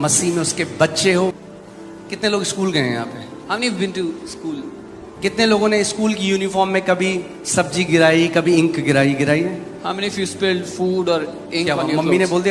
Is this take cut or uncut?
cut